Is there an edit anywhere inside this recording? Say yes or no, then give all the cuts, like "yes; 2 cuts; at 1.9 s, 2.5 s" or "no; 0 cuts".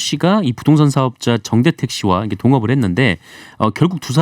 no; 0 cuts